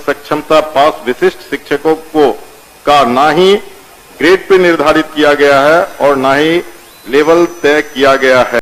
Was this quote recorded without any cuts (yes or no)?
yes